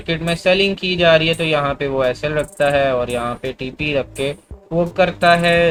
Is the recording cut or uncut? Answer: uncut